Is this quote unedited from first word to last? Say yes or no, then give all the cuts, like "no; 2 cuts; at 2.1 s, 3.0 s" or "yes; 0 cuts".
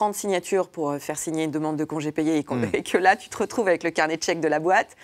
yes; 0 cuts